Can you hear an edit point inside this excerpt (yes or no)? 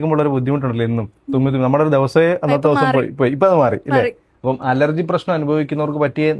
no